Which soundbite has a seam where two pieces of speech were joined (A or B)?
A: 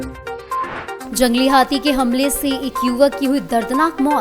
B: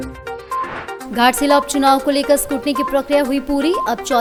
A